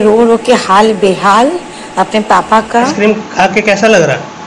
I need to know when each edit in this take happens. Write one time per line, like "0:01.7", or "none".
0:02.9